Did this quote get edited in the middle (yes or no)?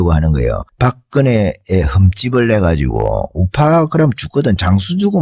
no